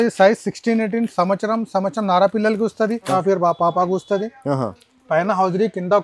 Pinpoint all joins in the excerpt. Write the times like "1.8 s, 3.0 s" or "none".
3.1 s